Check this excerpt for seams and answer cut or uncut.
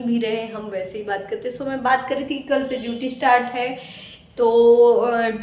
uncut